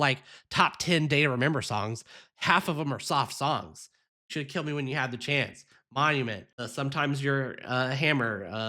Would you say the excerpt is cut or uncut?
cut